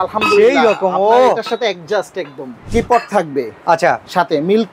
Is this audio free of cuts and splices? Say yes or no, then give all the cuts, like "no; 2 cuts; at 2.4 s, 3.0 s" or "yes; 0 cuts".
no; 1 cut; at 2.6 s